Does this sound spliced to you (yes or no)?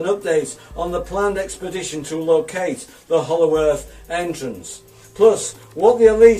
yes